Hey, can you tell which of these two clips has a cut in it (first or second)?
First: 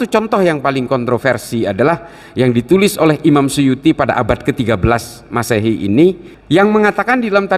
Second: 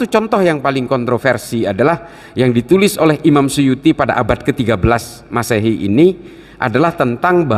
first